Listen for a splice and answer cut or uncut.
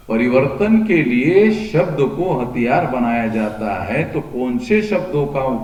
uncut